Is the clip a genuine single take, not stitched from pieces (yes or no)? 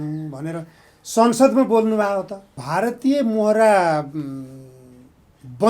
no